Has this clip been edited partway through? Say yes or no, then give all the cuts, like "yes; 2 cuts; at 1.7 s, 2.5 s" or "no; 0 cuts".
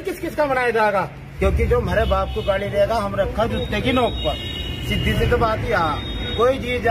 yes; 1 cut; at 1.2 s